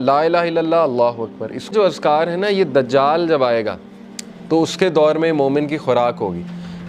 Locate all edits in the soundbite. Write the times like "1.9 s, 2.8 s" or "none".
1.7 s